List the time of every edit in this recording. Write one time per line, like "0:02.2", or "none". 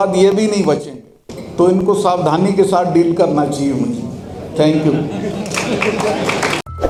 none